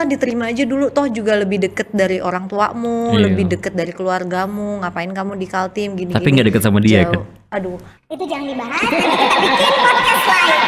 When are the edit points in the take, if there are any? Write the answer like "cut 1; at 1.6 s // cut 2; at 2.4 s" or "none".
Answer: none